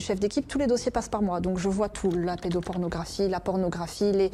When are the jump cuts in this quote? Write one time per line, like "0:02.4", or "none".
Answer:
none